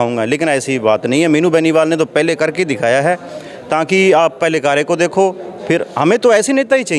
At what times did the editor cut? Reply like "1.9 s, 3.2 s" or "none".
none